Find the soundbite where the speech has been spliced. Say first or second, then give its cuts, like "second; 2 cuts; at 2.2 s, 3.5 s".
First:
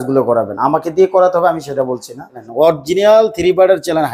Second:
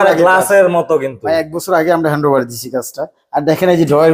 first; 1 cut; at 2.5 s